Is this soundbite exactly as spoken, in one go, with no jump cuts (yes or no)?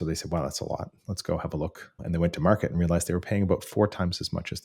no